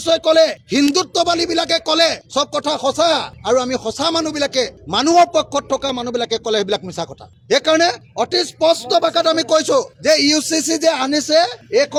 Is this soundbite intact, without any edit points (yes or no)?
yes